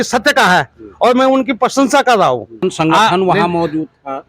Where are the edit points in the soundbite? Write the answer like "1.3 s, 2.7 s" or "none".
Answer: 2.6 s